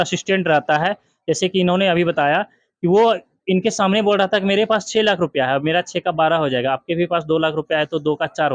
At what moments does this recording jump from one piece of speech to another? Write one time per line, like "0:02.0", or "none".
none